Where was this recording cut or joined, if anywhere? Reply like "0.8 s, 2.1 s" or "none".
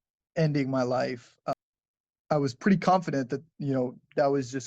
1.5 s